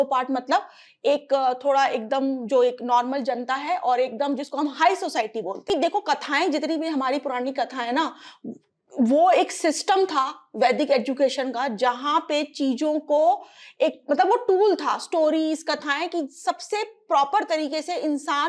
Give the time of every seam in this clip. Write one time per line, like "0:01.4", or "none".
0:05.7